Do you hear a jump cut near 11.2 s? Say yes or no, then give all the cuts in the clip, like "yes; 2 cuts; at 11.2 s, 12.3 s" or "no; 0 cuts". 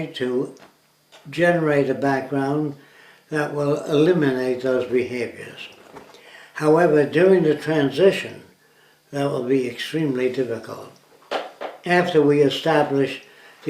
yes; 1 cut; at 11.2 s